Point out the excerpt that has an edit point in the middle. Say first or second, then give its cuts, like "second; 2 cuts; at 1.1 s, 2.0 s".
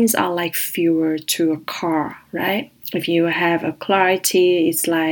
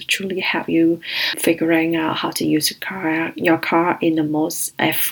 second; 1 cut; at 1.3 s